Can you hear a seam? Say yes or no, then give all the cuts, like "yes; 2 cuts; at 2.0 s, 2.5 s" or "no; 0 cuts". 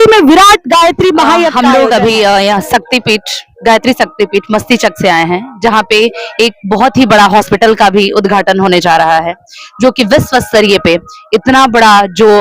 yes; 1 cut; at 1.5 s